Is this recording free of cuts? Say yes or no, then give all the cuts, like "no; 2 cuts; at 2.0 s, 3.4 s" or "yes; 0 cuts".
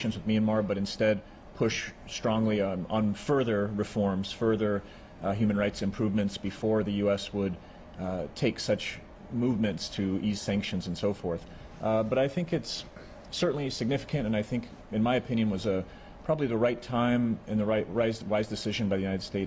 yes; 0 cuts